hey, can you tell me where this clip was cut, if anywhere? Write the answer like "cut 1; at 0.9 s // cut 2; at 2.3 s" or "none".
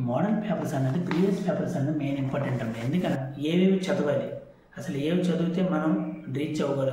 cut 1; at 3.2 s